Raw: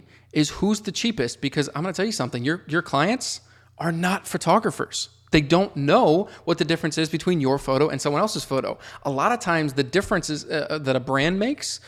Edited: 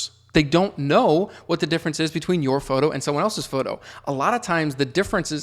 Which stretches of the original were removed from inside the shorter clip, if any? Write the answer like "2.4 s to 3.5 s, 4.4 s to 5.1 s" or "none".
none